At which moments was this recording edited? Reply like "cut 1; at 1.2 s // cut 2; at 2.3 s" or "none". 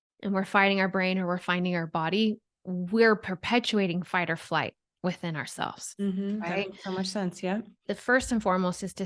cut 1; at 7.8 s

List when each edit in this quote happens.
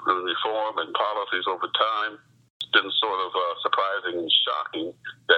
cut 1; at 2.5 s

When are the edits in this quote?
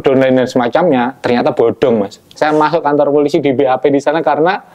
cut 1; at 2.3 s

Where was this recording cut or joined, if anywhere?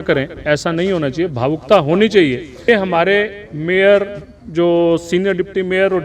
cut 1; at 2.7 s

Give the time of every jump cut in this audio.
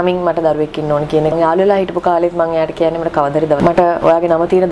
cut 1; at 1.3 s // cut 2; at 3.6 s

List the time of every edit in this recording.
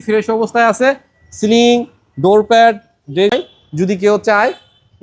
cut 1; at 3.3 s

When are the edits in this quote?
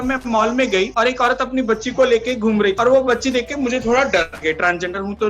cut 1; at 0.9 s // cut 2; at 2.7 s

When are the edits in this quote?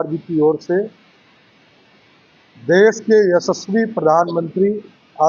none

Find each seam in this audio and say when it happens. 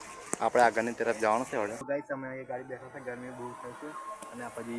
cut 1; at 2.1 s

